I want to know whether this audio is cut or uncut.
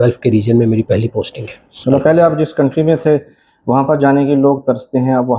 cut